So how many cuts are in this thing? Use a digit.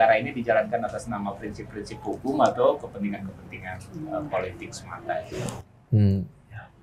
0